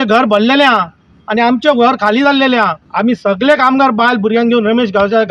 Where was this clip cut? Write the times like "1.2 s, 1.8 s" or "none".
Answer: 2.8 s